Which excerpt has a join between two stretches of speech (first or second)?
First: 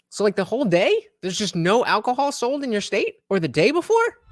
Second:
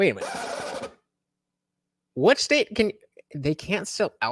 first